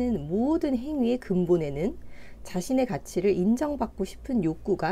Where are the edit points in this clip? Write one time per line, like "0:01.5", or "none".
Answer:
none